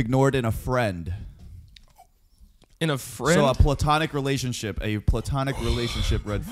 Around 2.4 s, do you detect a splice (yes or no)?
no